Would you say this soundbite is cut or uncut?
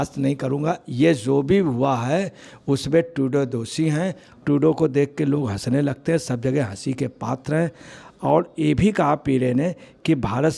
cut